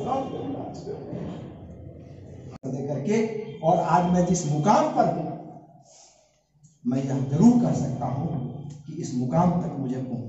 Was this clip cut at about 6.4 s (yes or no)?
no